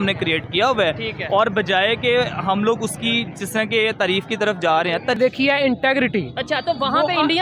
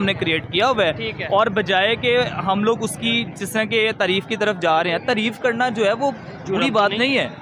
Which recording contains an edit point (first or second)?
first